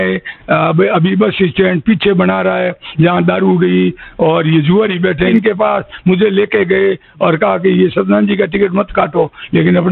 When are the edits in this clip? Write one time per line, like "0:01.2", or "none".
0:05.3